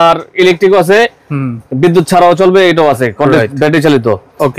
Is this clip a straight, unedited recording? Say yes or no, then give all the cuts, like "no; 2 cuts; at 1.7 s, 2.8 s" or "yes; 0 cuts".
yes; 0 cuts